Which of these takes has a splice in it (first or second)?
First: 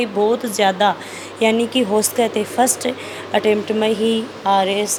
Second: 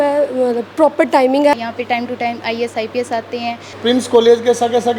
second